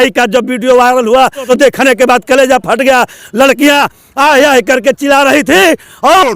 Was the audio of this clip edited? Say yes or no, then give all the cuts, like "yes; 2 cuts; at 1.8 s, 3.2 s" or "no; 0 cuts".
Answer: yes; 1 cut; at 1.5 s